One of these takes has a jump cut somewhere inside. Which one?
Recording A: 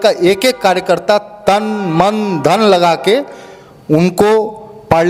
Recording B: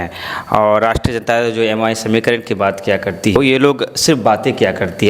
B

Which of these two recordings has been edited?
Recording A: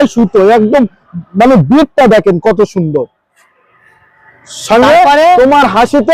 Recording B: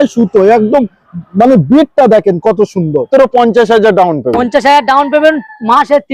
B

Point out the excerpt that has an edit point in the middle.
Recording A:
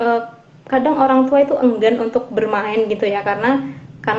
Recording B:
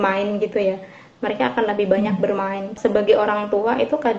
B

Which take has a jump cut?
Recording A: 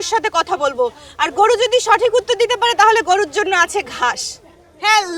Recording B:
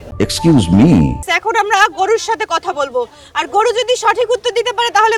B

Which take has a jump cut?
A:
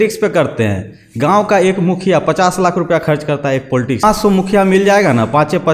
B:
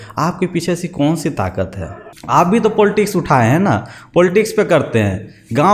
A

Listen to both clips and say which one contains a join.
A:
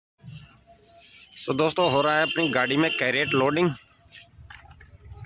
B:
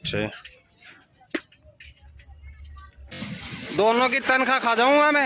B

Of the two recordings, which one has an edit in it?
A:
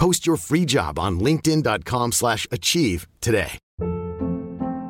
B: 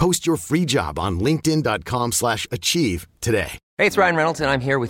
A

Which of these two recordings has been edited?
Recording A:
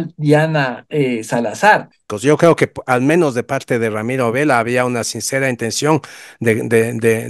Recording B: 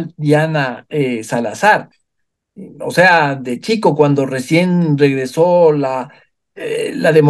A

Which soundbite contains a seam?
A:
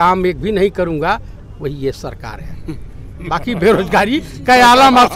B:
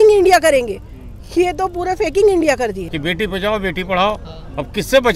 B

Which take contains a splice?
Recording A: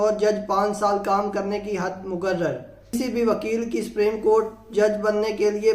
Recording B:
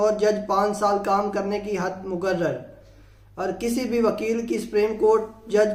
A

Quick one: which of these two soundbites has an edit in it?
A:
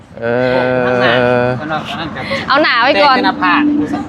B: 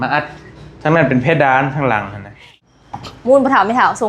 B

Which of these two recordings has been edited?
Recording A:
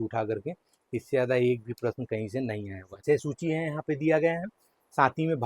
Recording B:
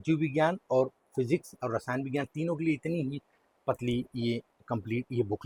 A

